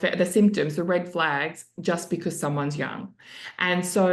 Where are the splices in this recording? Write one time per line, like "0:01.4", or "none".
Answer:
none

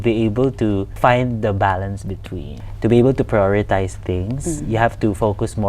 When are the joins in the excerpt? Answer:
0:01.0
0:02.5

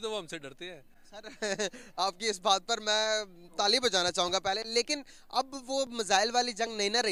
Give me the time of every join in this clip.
none

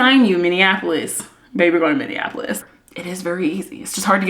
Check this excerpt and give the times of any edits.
0:02.6

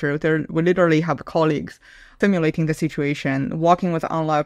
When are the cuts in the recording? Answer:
0:02.1

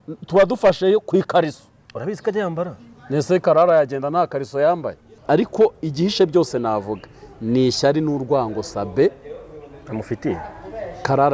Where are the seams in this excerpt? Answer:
0:05.1

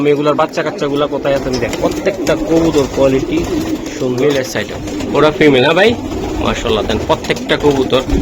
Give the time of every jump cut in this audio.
0:04.2

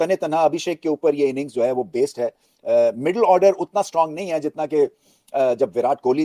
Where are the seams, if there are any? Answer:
none

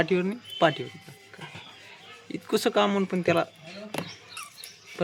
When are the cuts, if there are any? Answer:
none

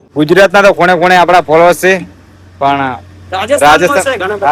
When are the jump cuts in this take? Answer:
none

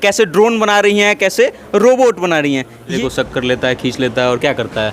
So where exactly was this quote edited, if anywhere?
0:03.0

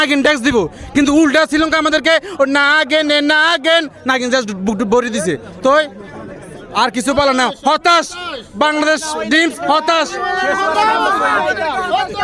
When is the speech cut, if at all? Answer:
none

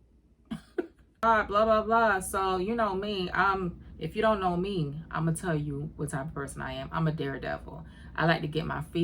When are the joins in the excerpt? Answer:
0:01.2

